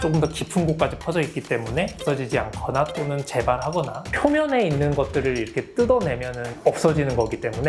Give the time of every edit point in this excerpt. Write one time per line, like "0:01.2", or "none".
0:02.0
0:04.1